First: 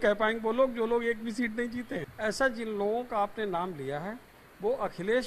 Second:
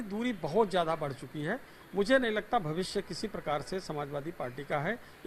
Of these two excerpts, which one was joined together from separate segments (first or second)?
first